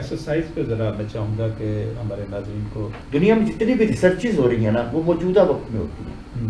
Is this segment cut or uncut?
cut